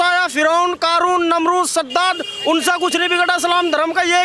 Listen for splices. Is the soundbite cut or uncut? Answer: uncut